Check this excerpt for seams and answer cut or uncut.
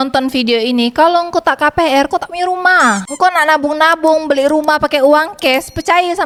uncut